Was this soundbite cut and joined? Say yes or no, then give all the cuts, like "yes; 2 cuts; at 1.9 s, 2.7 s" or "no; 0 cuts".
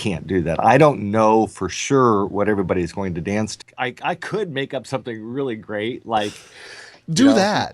yes; 1 cut; at 3.5 s